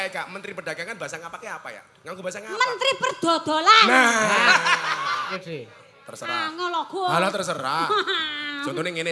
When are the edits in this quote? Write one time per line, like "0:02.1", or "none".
0:05.3